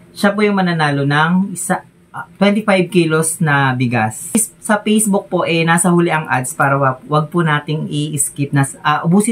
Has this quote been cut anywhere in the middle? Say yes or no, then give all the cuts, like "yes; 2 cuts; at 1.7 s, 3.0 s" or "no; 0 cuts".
yes; 1 cut; at 4.3 s